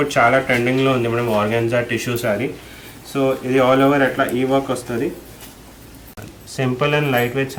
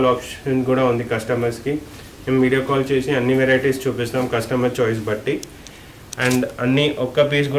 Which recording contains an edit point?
first; 1 cut; at 6.4 s

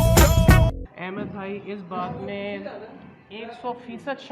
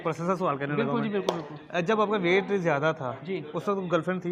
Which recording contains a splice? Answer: first; 1 cut; at 0.9 s

